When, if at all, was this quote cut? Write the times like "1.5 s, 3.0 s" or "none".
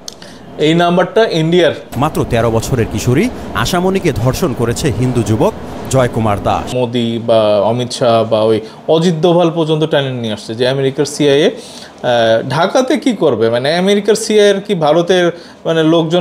1.9 s, 6.7 s